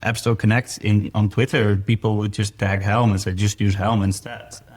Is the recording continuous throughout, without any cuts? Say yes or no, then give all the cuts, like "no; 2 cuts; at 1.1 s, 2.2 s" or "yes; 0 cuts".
no; 1 cut; at 3.5 s